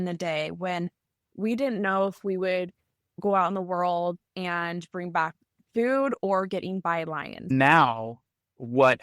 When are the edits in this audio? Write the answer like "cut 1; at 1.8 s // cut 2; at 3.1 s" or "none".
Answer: cut 1; at 3.2 s // cut 2; at 7.5 s